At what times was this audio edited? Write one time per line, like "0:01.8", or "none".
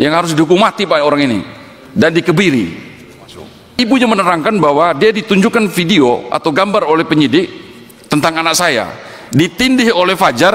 0:03.7